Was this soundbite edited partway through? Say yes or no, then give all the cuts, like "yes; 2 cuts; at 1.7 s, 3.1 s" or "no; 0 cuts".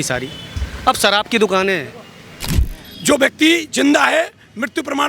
yes; 1 cut; at 2.6 s